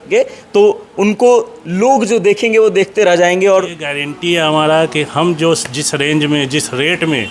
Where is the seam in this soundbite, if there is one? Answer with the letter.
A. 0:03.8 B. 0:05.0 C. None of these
A